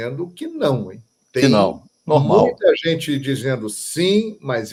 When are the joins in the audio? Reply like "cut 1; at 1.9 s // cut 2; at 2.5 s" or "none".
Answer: none